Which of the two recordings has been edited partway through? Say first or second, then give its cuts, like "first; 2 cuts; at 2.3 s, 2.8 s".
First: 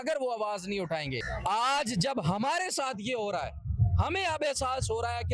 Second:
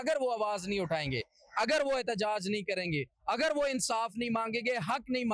first; 1 cut; at 1.3 s